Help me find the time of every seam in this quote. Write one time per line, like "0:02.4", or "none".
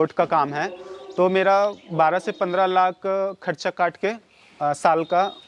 none